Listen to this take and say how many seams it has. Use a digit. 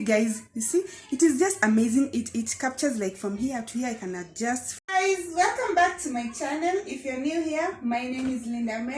1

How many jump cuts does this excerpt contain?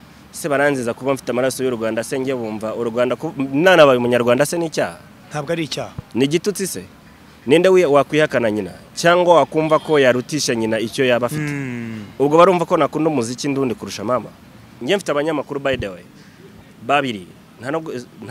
1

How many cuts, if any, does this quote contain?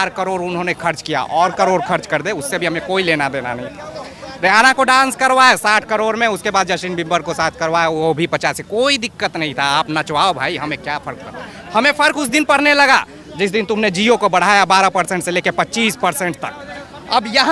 0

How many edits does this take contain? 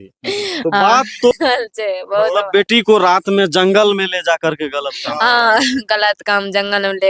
1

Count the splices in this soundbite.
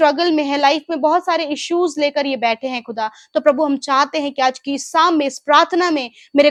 0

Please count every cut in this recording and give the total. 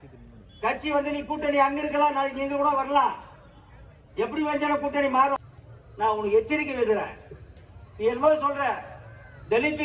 1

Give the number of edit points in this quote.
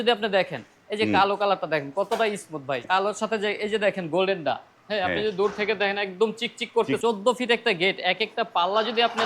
2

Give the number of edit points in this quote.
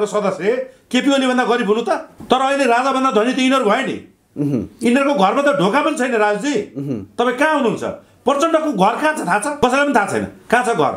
2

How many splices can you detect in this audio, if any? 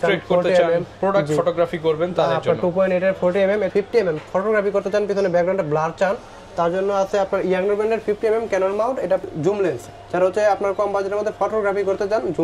2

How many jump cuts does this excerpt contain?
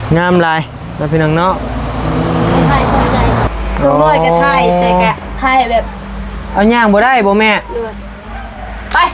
1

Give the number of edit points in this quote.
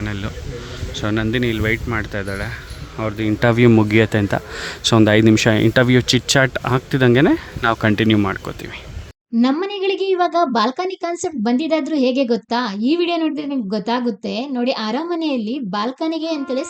1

